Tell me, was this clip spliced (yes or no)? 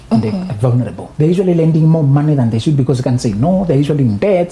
yes